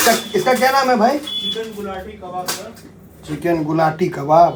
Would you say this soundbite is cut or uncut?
uncut